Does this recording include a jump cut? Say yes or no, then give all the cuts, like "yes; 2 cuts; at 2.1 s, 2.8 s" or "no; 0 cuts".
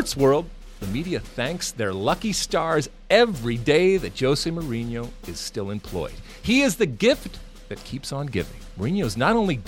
yes; 1 cut; at 8.6 s